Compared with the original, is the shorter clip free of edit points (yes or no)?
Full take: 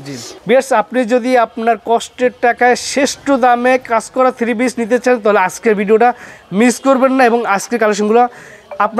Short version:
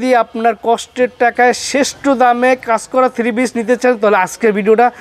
yes